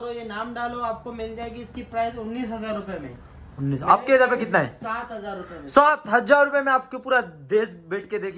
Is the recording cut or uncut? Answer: uncut